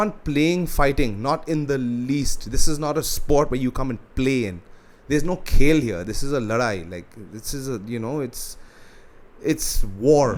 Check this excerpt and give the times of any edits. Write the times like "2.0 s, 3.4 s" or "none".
none